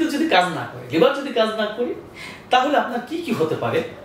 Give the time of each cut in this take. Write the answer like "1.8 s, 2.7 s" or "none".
none